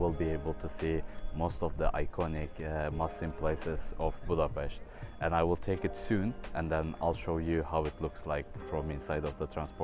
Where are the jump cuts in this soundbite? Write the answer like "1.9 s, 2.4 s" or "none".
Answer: none